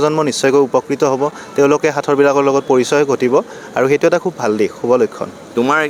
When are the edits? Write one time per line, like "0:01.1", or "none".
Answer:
none